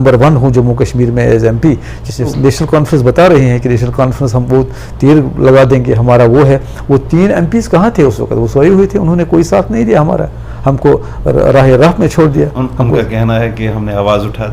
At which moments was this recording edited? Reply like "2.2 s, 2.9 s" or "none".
2.3 s

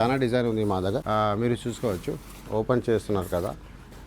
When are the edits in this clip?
1.0 s

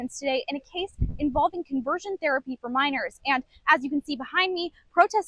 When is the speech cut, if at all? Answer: none

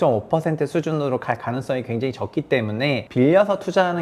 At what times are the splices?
3.1 s

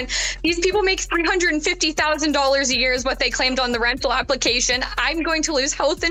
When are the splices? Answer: none

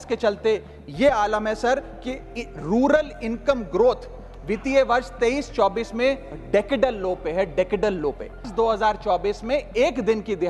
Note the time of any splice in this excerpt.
8.5 s

